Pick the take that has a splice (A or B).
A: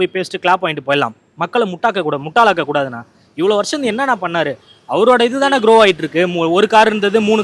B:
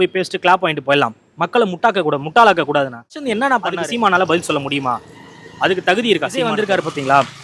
B